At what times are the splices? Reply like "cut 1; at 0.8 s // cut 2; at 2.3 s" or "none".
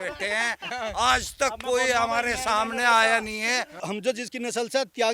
cut 1; at 3.8 s